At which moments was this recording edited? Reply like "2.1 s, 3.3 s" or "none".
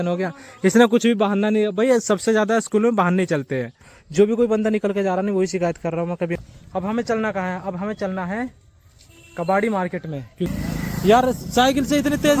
4.0 s, 6.4 s, 10.5 s